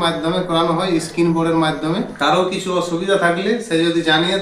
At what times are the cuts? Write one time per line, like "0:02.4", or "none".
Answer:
0:02.1